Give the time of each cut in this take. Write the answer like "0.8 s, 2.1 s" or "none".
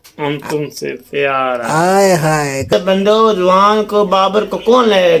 2.7 s

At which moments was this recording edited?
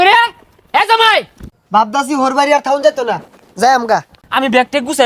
1.4 s, 4.2 s

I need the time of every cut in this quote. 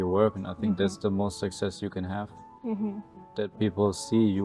none

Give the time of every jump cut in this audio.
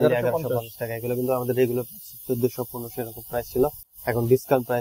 none

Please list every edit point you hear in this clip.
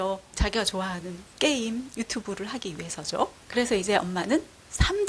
none

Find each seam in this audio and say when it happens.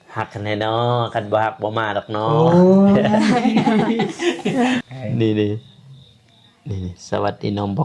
4.8 s

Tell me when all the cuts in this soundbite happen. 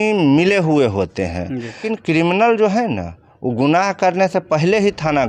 1.8 s

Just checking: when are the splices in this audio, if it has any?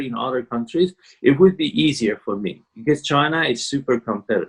none

